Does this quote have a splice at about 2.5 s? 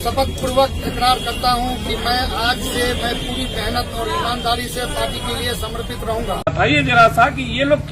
no; 1 cut; at 6.4 s

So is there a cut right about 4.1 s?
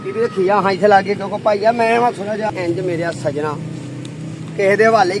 no; 1 cut; at 2.5 s

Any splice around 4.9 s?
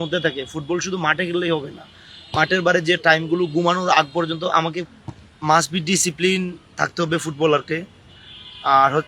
yes; 1 cut; at 4.9 s

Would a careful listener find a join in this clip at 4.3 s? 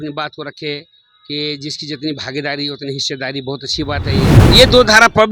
yes; 1 cut; at 4.3 s

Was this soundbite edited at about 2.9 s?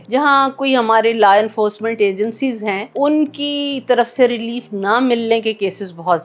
yes; 1 cut; at 2.9 s

